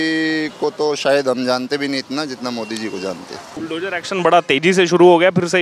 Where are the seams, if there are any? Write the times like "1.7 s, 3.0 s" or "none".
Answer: 3.5 s